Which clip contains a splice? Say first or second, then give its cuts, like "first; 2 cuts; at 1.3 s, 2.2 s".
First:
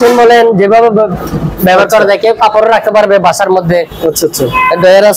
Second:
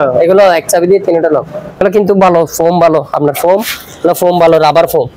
second; 1 cut; at 1.8 s